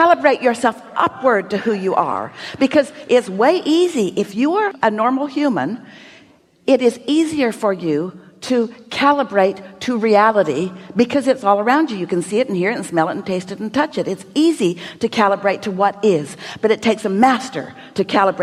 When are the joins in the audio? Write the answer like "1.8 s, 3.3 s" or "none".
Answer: none